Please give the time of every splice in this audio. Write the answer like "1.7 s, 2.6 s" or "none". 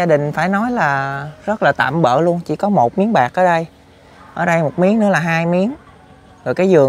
none